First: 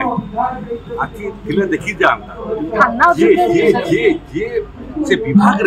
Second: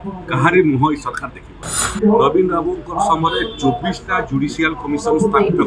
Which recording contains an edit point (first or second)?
second